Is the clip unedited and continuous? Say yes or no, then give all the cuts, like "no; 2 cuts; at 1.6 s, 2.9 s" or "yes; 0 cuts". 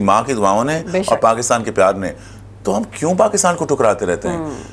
yes; 0 cuts